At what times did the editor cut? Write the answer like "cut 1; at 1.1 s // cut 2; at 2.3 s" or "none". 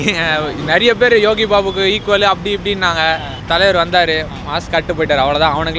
none